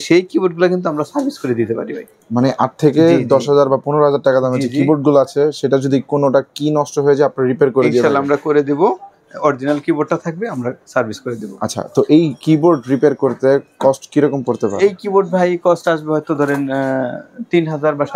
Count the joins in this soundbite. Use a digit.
0